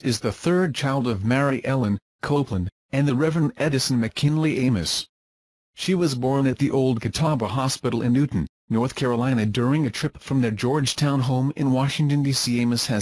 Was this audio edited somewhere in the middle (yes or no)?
no